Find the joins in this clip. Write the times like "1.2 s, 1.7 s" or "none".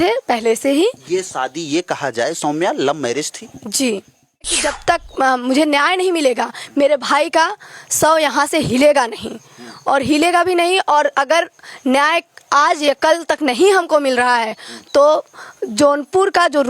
4.7 s

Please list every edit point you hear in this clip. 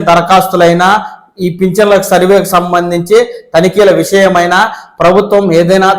none

